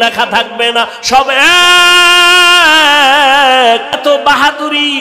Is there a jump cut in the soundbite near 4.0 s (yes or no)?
yes